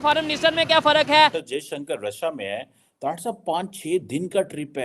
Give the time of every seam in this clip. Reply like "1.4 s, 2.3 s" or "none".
1.5 s